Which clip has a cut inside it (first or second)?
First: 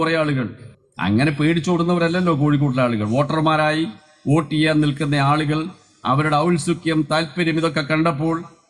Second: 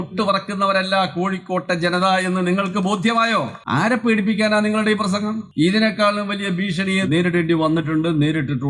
second